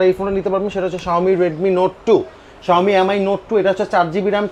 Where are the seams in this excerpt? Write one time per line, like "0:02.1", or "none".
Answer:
none